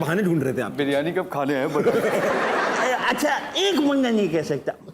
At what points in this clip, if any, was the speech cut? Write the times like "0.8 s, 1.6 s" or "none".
2.3 s